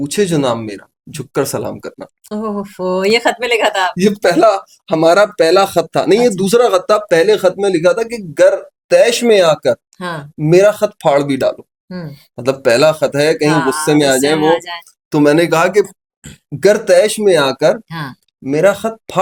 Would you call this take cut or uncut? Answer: uncut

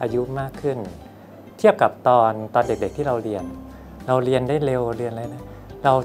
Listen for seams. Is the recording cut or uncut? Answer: uncut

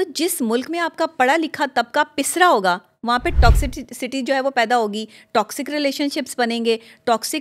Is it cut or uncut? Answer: uncut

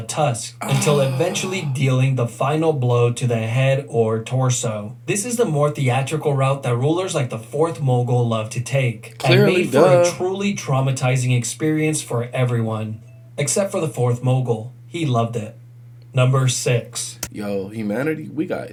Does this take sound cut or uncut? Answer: uncut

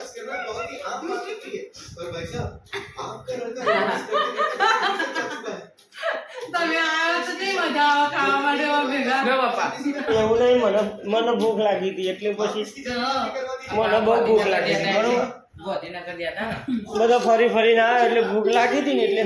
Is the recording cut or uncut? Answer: uncut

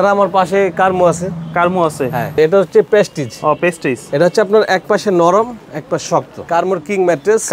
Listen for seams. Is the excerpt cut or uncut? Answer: cut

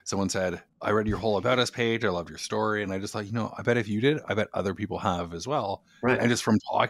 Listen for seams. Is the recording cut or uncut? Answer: uncut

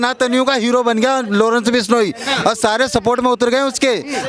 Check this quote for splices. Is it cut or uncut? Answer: uncut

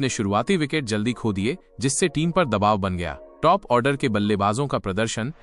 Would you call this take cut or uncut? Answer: uncut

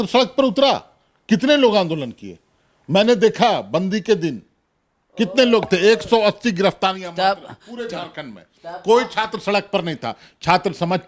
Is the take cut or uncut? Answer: uncut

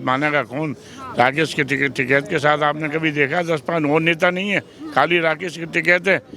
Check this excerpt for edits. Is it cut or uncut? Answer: uncut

